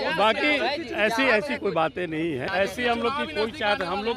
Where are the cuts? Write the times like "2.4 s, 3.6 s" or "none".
2.5 s